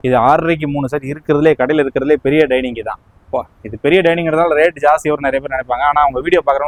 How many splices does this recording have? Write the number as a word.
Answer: zero